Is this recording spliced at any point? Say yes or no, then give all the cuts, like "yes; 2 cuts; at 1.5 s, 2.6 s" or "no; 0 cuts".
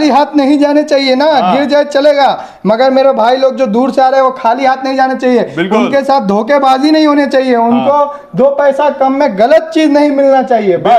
no; 0 cuts